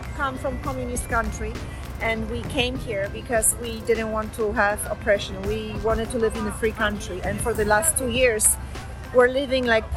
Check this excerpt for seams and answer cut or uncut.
uncut